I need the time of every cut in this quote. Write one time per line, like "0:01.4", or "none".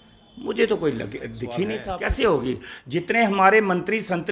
0:01.8